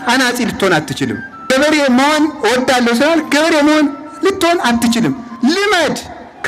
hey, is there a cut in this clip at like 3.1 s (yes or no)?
no